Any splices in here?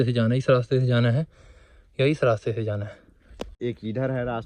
yes; 1 cut; at 3.5 s

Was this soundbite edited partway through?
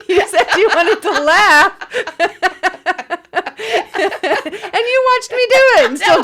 no; 0 cuts

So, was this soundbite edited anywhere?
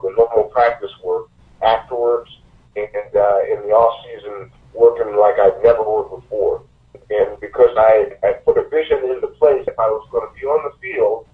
yes; 3 cuts; at 7.0 s, 8.1 s, 9.7 s

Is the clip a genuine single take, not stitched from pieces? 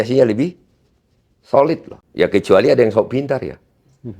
no; 1 cut; at 2.0 s

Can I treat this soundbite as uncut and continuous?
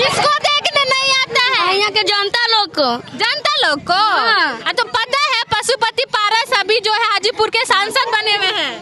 yes; 0 cuts

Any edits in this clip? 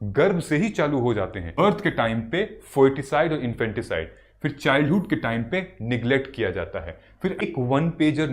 yes; 2 cuts; at 1.5 s, 7.4 s

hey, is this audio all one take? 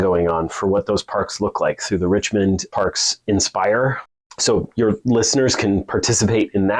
no; 2 cuts; at 2.7 s, 4.1 s

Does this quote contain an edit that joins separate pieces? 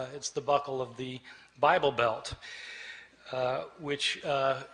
no; 0 cuts

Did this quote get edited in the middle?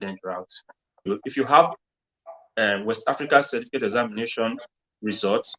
yes; 1 cut; at 1.0 s

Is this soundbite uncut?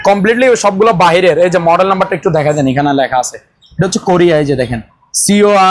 yes; 0 cuts

